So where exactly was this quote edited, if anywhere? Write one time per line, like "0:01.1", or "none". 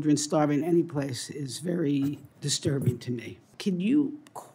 0:03.5